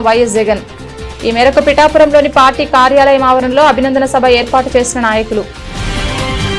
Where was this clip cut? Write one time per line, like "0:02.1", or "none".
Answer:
0:05.6